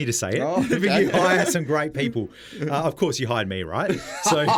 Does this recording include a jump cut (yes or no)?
no